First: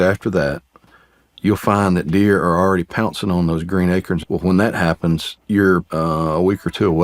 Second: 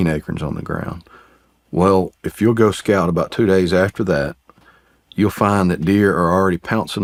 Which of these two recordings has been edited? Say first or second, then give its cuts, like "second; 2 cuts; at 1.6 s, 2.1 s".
first; 3 cuts; at 4.2 s, 5.3 s, 5.9 s